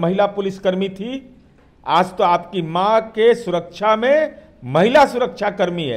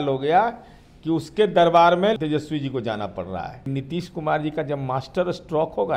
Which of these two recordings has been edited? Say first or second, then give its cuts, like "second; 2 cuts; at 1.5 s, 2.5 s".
second; 2 cuts; at 2.2 s, 3.7 s